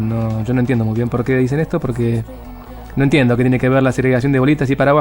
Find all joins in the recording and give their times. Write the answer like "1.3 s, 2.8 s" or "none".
none